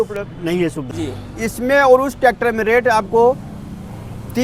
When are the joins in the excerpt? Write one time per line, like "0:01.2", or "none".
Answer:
0:00.9

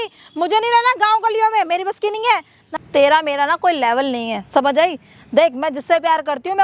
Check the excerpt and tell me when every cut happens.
0:02.7

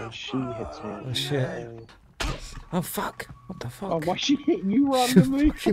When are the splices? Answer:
none

